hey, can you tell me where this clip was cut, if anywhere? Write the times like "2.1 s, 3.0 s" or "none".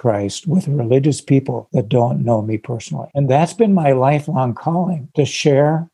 1.6 s, 3.0 s, 5.0 s